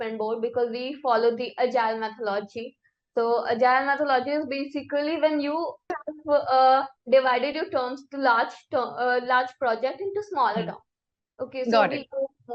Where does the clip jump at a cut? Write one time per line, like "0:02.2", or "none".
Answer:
0:05.9
0:06.9